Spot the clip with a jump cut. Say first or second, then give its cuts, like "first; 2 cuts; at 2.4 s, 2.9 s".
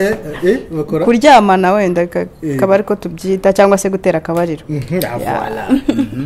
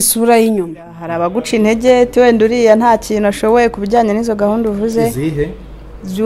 second; 1 cut; at 1.1 s